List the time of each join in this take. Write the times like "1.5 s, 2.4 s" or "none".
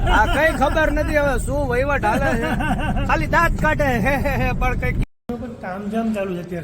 5.2 s